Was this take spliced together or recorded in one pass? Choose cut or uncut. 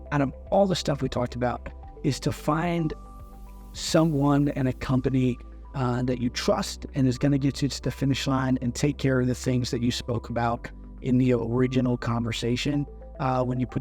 uncut